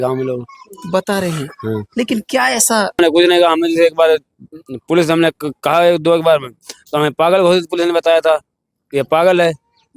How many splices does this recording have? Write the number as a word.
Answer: one